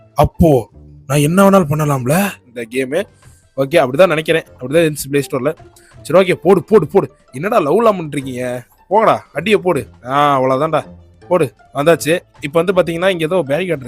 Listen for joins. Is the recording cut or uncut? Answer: cut